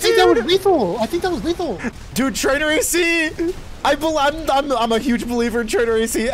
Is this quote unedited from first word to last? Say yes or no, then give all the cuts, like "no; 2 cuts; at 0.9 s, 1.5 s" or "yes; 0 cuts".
no; 1 cut; at 1.9 s